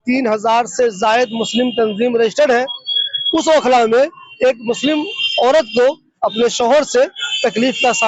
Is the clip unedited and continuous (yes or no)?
yes